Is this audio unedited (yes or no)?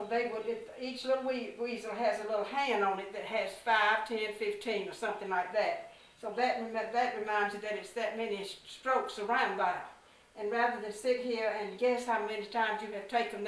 yes